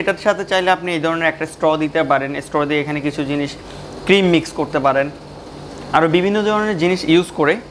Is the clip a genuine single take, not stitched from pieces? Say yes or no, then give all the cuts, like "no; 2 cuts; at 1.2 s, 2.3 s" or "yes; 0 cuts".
yes; 0 cuts